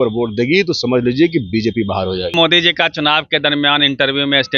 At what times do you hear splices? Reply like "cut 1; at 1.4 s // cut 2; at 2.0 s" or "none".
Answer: cut 1; at 2.3 s